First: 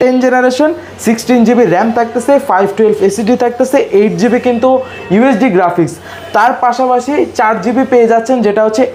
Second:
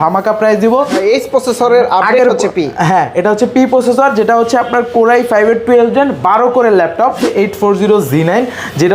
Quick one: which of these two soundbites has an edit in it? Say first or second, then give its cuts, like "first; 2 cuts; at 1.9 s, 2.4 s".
second; 2 cuts; at 1.0 s, 7.3 s